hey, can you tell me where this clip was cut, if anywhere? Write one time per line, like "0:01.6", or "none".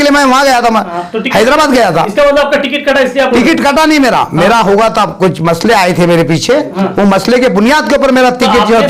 none